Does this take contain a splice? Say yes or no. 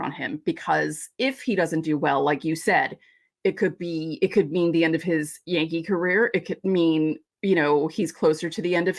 no